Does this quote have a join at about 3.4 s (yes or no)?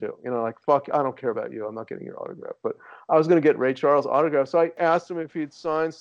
no